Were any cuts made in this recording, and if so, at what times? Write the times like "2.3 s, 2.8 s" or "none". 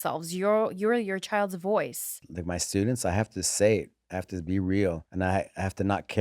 2.3 s, 5.1 s

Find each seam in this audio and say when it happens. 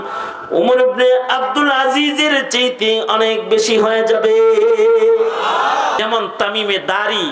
6.0 s

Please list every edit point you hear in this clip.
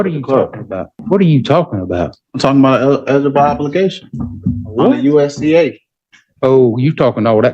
0.9 s

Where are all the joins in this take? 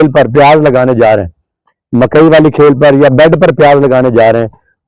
none

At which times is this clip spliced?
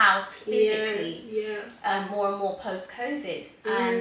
none

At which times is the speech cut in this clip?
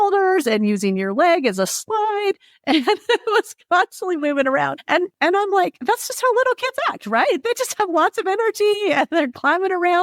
5.1 s

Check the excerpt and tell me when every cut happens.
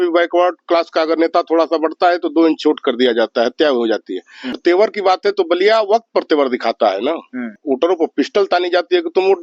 4.6 s, 7.6 s

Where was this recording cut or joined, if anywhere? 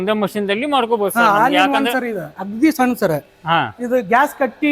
2.4 s

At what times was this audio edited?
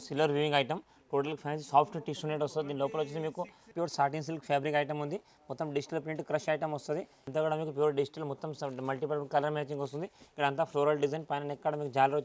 3.7 s, 7.2 s

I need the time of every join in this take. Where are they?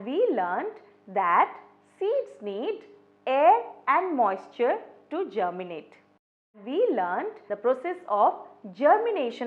6.5 s, 7.4 s

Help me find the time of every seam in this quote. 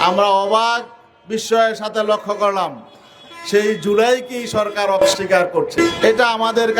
5.1 s

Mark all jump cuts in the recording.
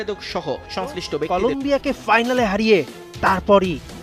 1.3 s

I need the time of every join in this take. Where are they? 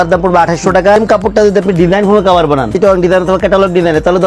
1.0 s, 2.7 s

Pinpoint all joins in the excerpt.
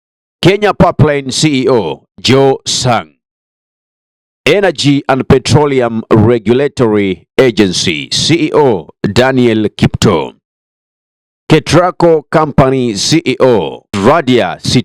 13.9 s

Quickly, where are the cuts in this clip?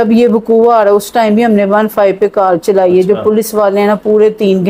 none

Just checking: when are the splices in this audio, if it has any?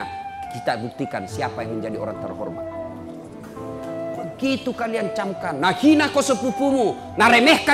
2.3 s, 4.4 s

